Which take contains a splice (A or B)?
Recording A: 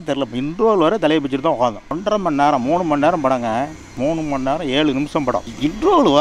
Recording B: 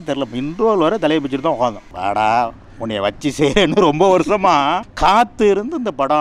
B